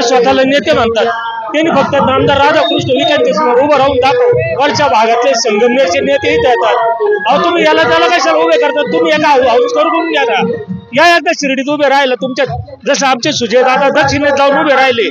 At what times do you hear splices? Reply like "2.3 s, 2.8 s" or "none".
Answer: 4.5 s